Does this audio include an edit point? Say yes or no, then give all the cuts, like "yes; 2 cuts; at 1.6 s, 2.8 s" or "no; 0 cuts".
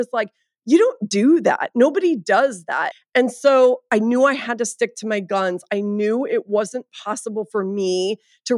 yes; 2 cuts; at 2.8 s, 3.9 s